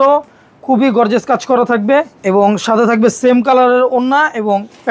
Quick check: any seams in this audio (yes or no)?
yes